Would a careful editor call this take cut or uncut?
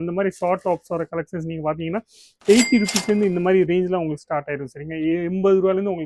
uncut